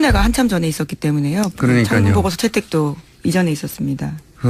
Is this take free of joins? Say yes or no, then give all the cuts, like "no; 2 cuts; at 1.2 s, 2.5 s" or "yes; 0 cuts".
no; 1 cut; at 3.3 s